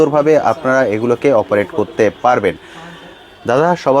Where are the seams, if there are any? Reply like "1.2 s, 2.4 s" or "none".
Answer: none